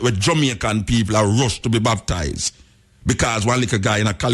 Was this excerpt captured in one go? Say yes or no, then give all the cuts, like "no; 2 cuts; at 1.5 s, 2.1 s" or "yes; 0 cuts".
yes; 0 cuts